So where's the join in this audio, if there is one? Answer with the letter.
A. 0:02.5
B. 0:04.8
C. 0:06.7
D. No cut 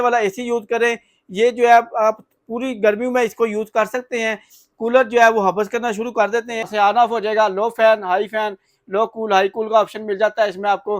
C